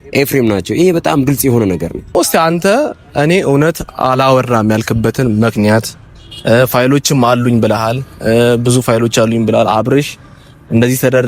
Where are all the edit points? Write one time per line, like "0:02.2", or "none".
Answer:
0:02.2